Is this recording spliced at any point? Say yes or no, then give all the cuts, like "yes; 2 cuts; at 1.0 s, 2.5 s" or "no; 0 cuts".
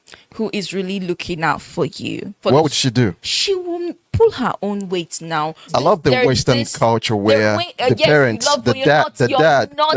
yes; 3 cuts; at 2.4 s, 3.3 s, 5.7 s